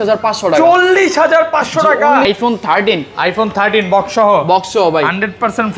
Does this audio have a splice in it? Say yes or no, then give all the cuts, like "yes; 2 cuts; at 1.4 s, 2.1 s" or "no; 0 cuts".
yes; 1 cut; at 2.3 s